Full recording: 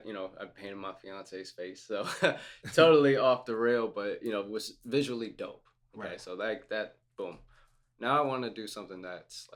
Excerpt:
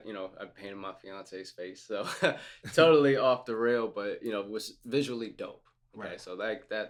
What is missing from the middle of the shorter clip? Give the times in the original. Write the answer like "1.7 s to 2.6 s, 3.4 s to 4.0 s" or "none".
none